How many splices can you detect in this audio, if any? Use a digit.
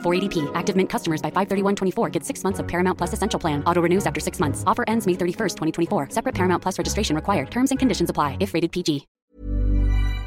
1